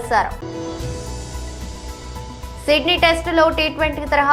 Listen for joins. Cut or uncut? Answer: uncut